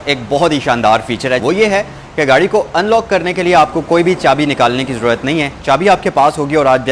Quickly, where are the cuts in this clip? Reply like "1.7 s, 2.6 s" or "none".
1.4 s